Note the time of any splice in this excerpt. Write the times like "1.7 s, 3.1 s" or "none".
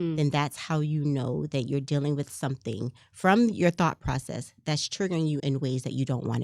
5.4 s